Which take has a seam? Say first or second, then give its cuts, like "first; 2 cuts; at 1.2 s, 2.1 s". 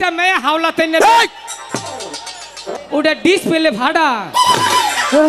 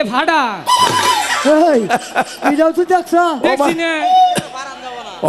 first; 1 cut; at 2.7 s